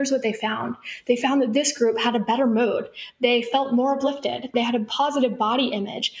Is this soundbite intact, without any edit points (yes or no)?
no